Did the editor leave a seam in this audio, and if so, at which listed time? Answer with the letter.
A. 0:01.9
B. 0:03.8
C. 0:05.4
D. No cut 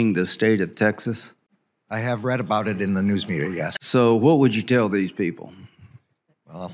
B